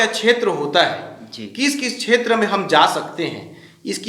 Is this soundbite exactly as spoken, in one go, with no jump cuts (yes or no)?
yes